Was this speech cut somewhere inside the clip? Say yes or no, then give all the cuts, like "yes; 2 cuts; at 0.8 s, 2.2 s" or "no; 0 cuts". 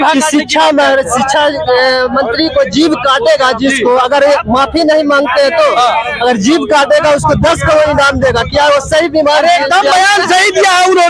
no; 0 cuts